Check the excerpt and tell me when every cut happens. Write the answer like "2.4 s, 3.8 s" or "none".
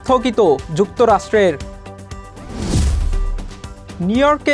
none